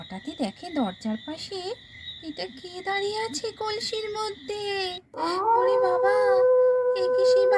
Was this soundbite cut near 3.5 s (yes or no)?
no